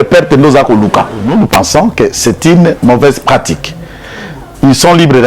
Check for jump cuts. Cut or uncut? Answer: cut